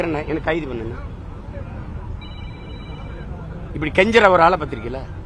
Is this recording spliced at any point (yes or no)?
no